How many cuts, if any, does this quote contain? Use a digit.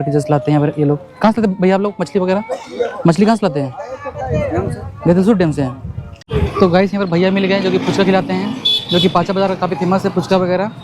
1